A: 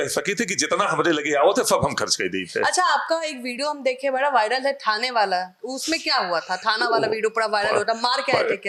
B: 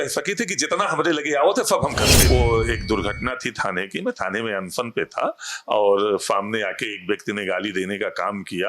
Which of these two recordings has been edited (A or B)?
B